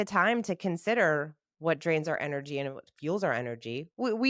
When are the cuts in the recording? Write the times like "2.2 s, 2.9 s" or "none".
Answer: none